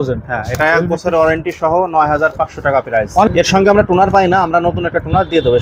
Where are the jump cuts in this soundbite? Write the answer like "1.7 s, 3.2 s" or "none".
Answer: 3.3 s